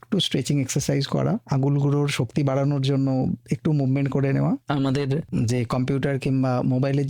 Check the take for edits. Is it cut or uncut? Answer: cut